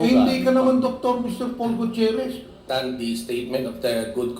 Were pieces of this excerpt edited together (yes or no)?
yes